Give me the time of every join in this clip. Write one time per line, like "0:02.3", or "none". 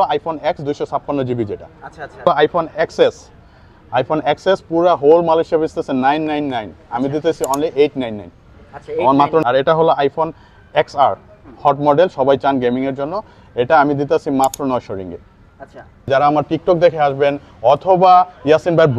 0:02.2
0:09.4
0:16.1